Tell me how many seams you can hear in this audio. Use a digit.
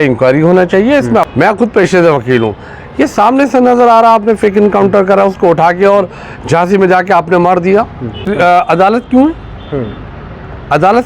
2